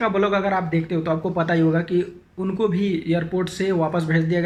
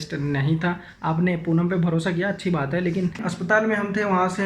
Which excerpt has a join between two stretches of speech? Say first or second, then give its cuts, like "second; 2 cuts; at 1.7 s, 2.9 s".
second; 2 cuts; at 0.9 s, 3.3 s